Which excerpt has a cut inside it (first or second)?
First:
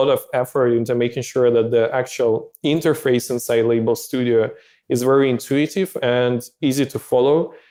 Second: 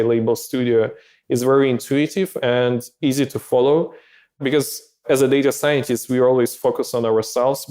second